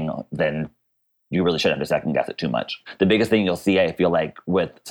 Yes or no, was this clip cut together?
yes